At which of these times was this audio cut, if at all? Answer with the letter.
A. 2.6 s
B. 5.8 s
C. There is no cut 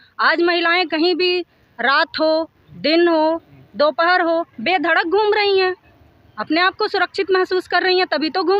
C